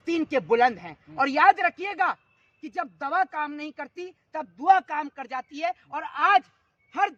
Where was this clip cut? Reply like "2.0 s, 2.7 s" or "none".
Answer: none